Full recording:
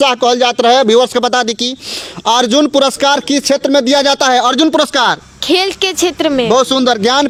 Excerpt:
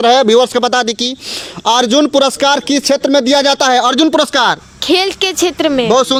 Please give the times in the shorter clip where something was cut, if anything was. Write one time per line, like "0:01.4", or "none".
none